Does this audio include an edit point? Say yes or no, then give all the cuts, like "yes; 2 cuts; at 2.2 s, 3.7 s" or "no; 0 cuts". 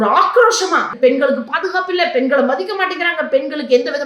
yes; 1 cut; at 0.9 s